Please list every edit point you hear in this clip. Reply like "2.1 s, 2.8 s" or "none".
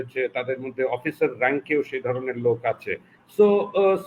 none